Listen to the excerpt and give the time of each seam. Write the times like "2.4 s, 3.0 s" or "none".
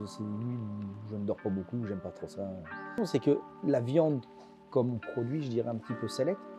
2.9 s